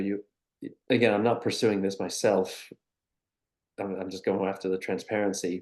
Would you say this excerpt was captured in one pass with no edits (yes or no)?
yes